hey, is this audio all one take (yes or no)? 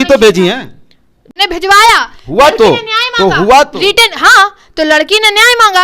no